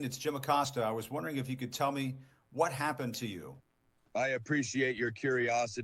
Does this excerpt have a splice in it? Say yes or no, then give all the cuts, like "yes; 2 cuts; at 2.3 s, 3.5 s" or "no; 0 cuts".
no; 0 cuts